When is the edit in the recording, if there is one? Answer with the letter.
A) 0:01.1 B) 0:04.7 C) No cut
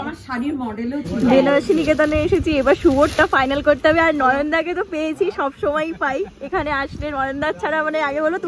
A